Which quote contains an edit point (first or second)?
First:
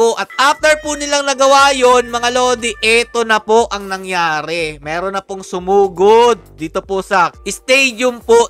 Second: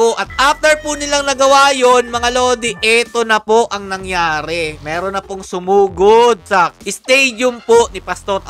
second